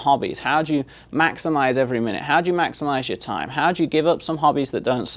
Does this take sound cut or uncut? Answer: uncut